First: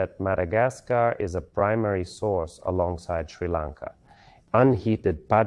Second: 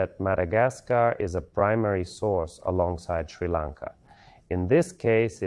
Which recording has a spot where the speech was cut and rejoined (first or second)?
first